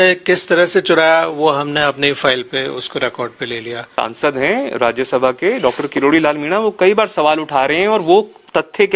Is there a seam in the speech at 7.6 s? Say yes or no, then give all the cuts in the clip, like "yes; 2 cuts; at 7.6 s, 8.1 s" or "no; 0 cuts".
no; 1 cut; at 3.9 s